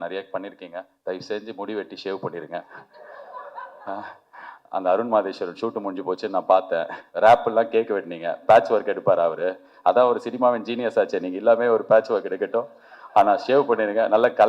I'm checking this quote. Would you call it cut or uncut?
uncut